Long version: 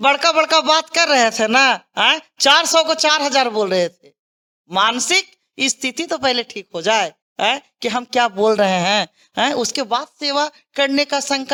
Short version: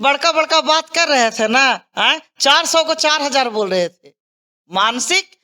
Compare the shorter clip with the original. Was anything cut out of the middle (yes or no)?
no